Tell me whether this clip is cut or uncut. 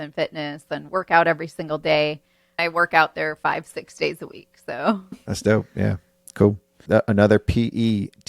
cut